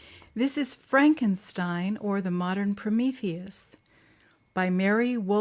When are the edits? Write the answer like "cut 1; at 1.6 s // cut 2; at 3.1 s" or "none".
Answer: cut 1; at 1.2 s